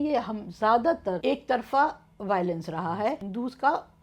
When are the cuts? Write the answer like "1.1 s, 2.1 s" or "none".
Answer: 1.2 s, 3.2 s